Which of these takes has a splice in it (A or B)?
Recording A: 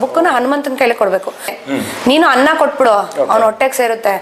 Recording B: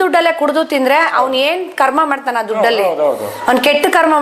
A